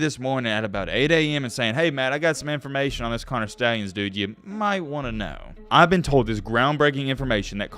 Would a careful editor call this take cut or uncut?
cut